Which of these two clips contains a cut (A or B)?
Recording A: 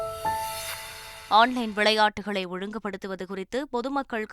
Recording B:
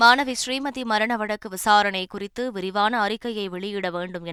A